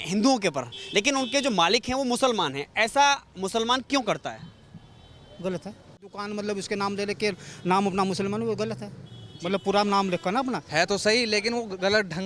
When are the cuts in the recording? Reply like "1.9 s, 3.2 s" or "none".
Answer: 6.2 s, 10.6 s